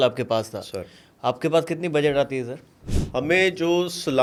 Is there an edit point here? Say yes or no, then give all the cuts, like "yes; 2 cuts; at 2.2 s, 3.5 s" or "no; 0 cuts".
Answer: no; 0 cuts